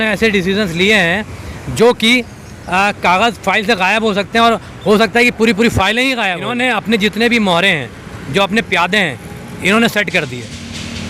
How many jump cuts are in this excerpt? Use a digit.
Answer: 1